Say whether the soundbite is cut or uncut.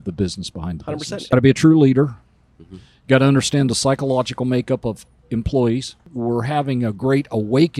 cut